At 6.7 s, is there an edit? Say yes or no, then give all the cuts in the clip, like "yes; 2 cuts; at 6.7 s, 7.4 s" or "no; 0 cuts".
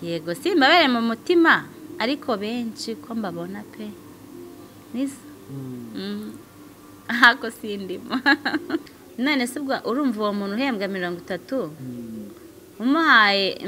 no; 1 cut; at 8.9 s